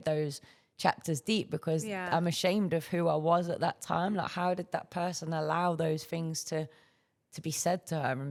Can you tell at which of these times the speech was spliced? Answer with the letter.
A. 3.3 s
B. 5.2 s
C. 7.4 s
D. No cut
D